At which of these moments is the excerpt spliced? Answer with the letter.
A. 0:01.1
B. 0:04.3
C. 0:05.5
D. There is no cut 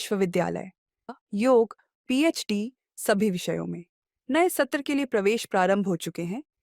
A